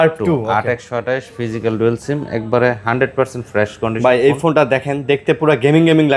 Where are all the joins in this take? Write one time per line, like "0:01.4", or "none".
none